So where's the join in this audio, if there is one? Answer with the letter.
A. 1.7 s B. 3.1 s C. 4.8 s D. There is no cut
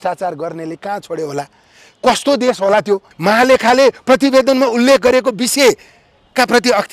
B